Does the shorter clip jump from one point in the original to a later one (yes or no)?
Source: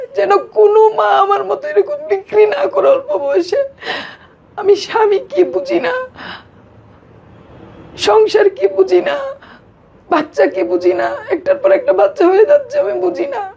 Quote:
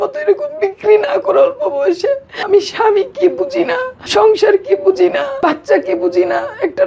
yes